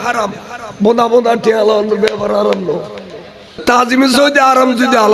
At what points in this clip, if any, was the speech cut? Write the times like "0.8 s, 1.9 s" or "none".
3.6 s